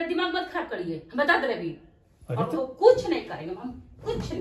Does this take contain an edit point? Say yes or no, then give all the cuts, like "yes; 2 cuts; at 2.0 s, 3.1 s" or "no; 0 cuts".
no; 0 cuts